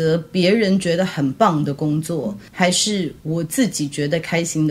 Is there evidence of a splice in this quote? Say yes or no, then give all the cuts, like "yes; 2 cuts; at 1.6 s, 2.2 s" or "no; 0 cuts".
yes; 1 cut; at 2.4 s